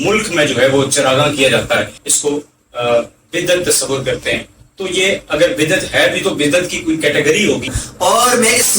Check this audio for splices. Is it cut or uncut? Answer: cut